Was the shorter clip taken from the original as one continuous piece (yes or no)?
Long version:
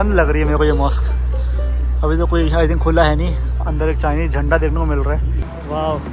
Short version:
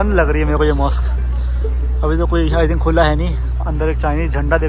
yes